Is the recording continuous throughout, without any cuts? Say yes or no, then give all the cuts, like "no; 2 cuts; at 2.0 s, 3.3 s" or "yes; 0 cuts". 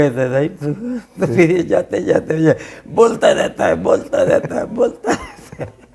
yes; 0 cuts